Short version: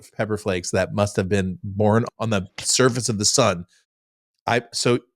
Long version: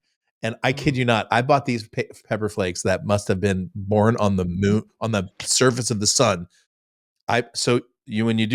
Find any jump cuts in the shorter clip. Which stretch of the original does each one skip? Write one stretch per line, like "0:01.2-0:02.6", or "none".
0:04.2-0:04.9